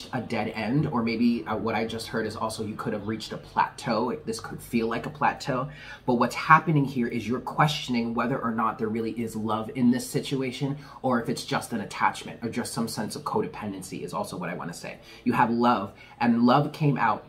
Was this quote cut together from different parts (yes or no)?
no